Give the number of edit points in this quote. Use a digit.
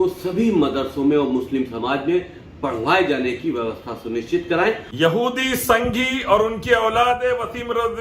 1